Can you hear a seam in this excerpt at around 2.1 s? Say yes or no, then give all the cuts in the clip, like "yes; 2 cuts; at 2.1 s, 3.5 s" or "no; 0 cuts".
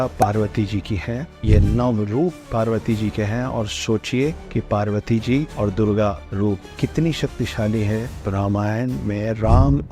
no; 4 cuts; at 4.4 s, 5.5 s, 6.3 s, 8.2 s